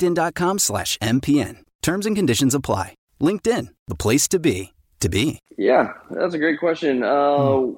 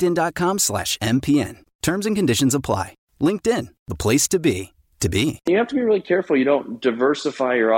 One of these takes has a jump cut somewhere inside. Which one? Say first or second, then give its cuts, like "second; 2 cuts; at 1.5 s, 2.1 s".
second; 1 cut; at 5.5 s